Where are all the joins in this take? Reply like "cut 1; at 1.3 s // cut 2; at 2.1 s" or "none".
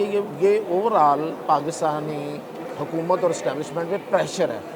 none